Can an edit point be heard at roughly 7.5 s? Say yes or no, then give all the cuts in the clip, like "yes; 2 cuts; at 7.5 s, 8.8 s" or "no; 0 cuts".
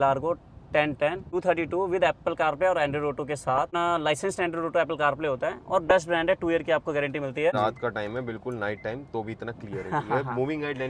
yes; 3 cuts; at 1.2 s, 3.7 s, 7.5 s